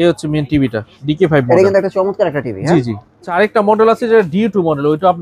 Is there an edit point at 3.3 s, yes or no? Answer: yes